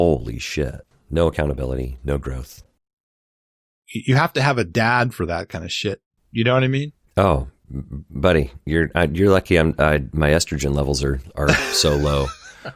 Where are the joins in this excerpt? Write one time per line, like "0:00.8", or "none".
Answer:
0:03.2